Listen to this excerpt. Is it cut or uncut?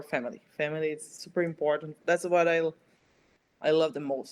uncut